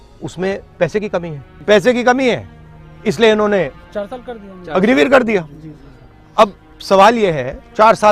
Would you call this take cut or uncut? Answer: uncut